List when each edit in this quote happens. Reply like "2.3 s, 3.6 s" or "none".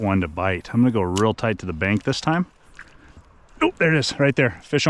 3.2 s